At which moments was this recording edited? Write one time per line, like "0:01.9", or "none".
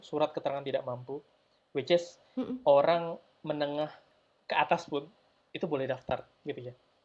none